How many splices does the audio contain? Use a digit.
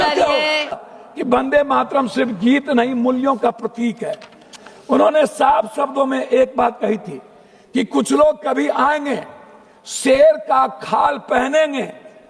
1